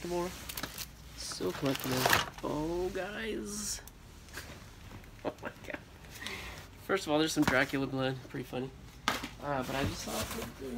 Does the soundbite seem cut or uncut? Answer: uncut